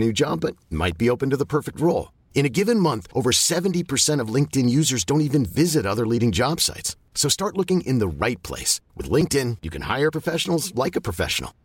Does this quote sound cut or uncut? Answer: uncut